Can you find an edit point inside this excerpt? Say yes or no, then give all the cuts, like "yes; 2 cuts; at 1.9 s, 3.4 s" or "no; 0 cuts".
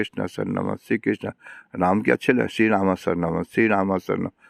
no; 0 cuts